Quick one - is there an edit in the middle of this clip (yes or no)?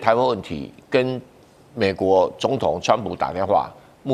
no